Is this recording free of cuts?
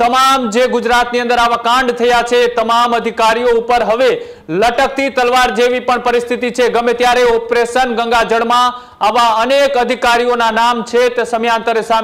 yes; 0 cuts

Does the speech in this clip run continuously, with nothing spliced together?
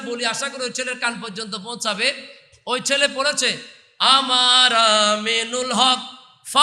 yes; 0 cuts

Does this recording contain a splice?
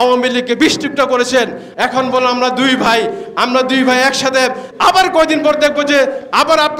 yes; 2 cuts; at 1.6 s, 4.7 s

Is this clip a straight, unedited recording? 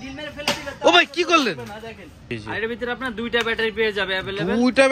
no; 1 cut; at 2.3 s

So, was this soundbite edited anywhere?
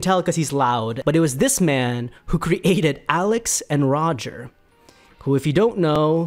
yes; 1 cut; at 1.0 s

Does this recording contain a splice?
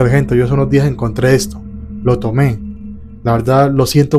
no; 0 cuts

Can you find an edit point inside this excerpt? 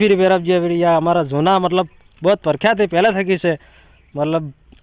no; 0 cuts

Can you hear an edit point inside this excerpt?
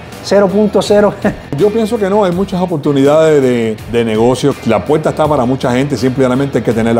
yes; 3 cuts; at 1.5 s, 3.8 s, 4.6 s

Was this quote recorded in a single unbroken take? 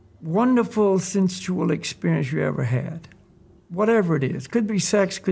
yes; 0 cuts

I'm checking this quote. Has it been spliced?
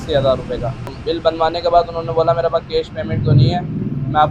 yes; 1 cut; at 1.0 s

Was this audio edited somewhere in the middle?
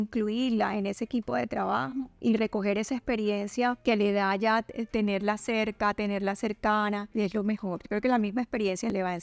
no; 0 cuts

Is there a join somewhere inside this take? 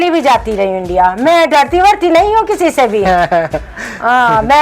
no; 0 cuts

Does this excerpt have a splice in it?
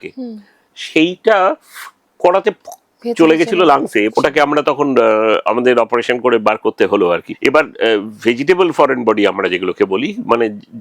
yes; 2 cuts; at 4.1 s, 7.3 s

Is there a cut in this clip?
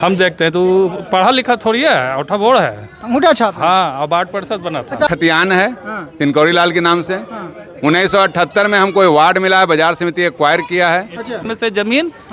yes; 2 cuts; at 5.1 s, 11.4 s

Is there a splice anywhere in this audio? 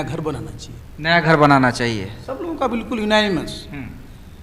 no; 0 cuts

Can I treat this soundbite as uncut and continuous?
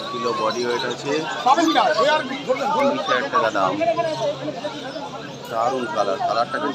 yes; 0 cuts

